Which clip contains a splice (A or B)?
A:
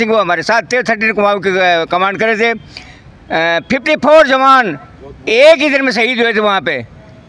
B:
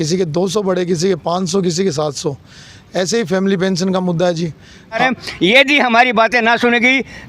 B